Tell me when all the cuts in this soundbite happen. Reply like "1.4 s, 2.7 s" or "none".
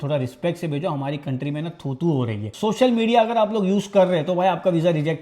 2.5 s